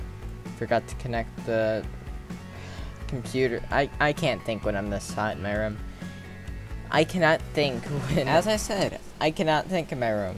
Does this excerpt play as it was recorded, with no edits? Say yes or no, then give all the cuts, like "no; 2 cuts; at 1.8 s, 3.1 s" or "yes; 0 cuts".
no; 1 cut; at 8.3 s